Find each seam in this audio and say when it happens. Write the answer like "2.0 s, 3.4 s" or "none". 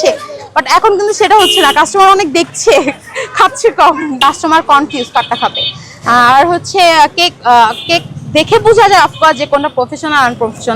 4.2 s